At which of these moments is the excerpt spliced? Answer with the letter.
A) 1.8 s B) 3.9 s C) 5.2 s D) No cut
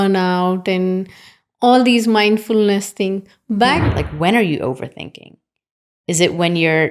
B